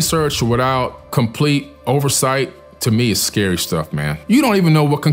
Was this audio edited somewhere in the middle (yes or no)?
no